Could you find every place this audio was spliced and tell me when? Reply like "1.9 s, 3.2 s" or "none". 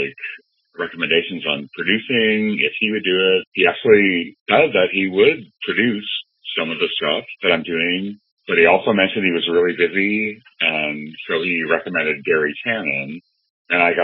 none